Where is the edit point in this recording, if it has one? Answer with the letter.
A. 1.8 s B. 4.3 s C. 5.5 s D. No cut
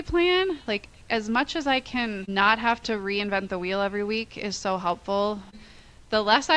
C